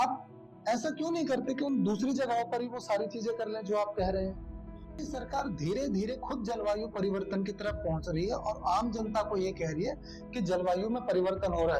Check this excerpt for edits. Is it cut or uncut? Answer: cut